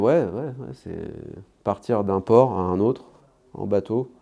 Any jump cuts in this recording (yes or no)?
no